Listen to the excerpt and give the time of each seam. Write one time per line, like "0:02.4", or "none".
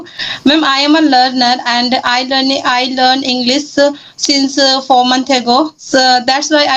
0:05.8

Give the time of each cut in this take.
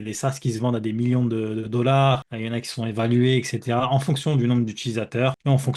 none

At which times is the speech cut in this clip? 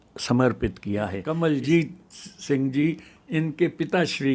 0:01.2

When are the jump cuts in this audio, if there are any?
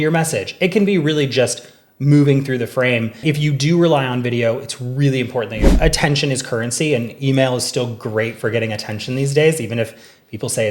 0:03.2
0:05.7

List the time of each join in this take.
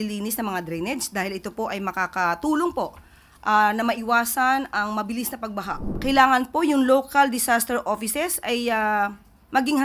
0:06.0

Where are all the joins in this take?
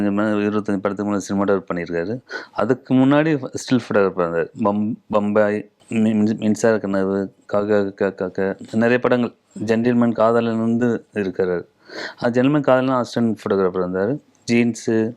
0:05.7

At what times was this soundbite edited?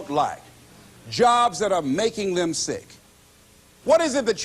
0:03.2

